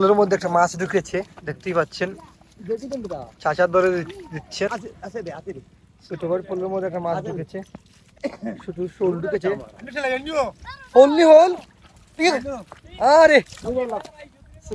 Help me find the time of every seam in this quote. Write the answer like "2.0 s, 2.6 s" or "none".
4.7 s, 8.1 s